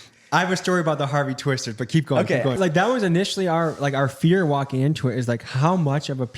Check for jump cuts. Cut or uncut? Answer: cut